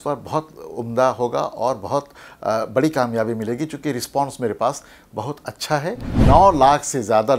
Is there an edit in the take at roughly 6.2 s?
yes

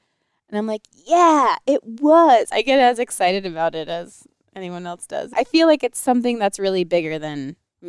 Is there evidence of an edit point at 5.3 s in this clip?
yes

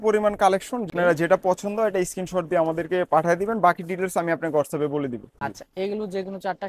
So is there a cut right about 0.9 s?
yes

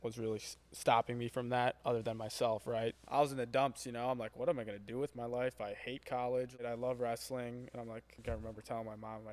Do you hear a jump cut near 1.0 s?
no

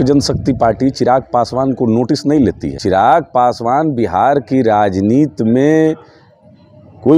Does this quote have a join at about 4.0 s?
no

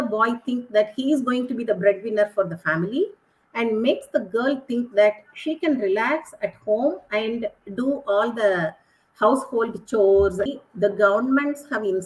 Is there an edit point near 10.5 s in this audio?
yes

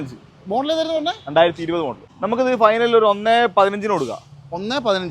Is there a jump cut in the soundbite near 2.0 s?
yes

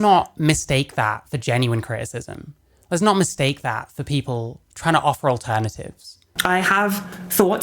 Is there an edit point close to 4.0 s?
no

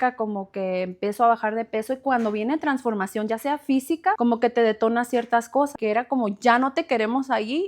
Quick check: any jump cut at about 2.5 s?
no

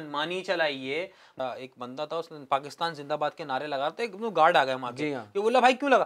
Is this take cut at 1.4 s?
yes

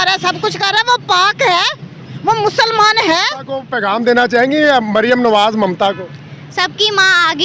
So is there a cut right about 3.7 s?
yes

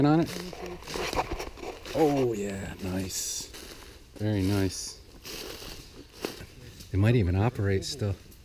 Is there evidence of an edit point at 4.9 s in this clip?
no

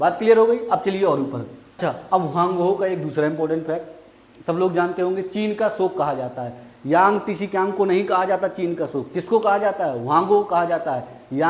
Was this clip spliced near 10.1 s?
no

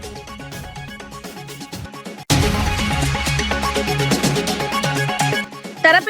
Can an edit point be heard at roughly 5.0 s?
yes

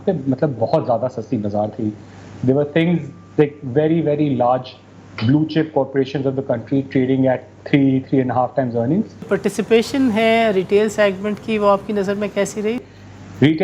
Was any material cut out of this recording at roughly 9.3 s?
yes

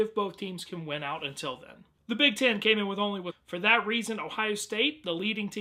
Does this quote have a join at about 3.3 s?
no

